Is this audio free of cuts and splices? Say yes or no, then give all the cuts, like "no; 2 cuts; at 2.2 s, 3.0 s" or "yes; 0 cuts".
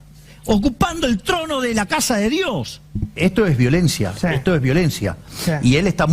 no; 1 cut; at 3.1 s